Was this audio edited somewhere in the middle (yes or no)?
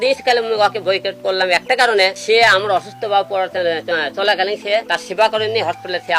yes